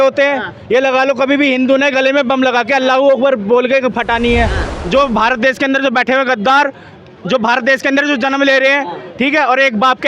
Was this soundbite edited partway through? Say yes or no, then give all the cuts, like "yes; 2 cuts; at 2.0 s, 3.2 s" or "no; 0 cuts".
yes; 1 cut; at 4.6 s